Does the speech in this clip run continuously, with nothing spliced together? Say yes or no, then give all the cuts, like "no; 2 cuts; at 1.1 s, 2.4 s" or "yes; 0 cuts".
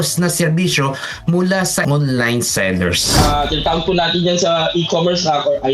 no; 1 cut; at 3.1 s